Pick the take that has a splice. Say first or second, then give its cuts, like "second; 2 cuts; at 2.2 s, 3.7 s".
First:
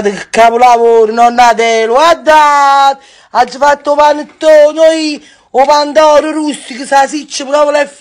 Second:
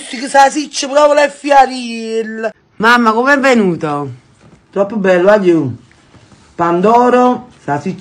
second; 1 cut; at 2.6 s